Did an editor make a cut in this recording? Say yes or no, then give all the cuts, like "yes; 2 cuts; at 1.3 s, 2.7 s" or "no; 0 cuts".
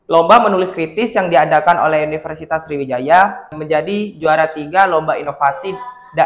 yes; 1 cut; at 3.6 s